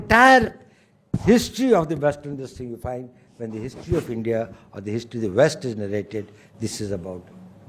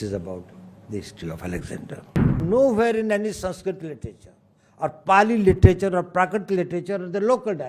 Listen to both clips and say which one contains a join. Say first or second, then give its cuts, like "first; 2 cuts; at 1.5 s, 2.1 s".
second; 1 cut; at 2.3 s